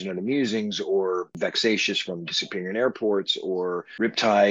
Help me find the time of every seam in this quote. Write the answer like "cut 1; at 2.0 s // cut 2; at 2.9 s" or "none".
cut 1; at 1.3 s